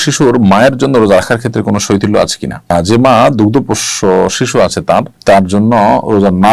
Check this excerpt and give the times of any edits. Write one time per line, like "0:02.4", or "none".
none